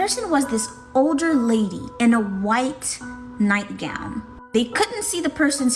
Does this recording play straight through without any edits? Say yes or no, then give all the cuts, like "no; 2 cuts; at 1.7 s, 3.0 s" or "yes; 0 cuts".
yes; 0 cuts